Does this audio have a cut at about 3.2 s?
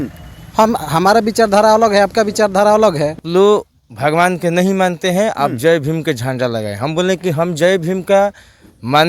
yes; 1 cut; at 3.2 s

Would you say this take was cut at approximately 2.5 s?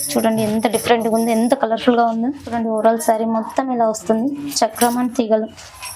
yes; 1 cut; at 2.5 s

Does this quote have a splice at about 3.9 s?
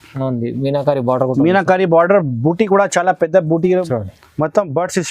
yes; 1 cut; at 3.9 s

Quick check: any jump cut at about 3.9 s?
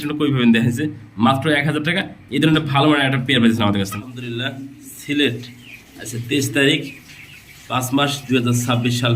yes; 1 cut; at 3.9 s

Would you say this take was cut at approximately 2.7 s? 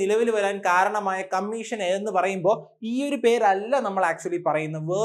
no; 0 cuts

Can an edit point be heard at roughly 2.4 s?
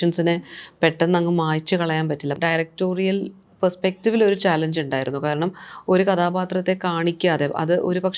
yes; 1 cut; at 2.4 s

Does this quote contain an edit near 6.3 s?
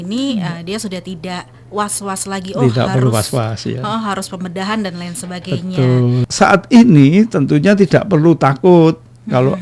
yes; 1 cut; at 6.3 s

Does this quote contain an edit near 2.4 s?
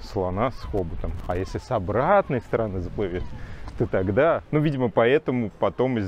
no; 1 cut; at 4.4 s

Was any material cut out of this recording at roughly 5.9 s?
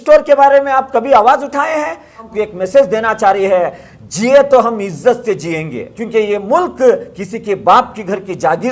yes; 2 cuts; at 2.3 s, 5.9 s

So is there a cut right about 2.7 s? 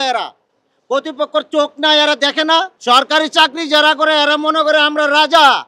yes; 1 cut; at 2.7 s

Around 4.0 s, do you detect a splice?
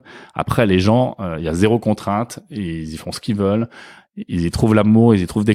yes; 1 cut; at 4.0 s

